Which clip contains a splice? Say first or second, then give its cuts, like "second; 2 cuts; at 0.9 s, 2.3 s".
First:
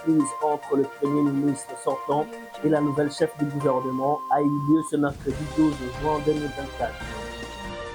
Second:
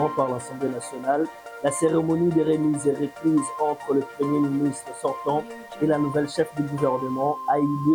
first; 1 cut; at 6.9 s